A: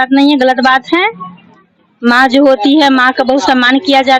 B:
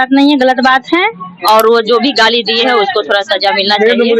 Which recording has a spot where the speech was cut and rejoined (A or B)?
B